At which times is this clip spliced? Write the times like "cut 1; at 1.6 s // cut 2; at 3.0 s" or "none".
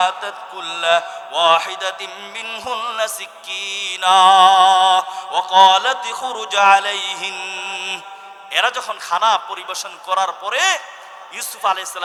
none